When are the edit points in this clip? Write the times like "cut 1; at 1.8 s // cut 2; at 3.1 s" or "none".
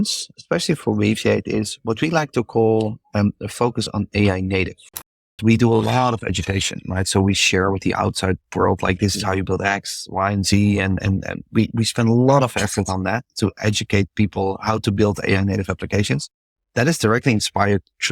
cut 1; at 5.4 s